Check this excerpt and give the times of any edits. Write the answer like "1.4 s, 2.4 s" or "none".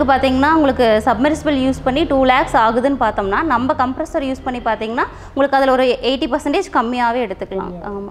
none